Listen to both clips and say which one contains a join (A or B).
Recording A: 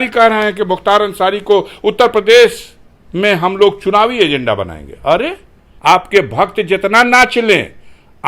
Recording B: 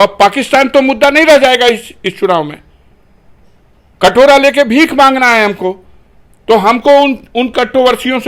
A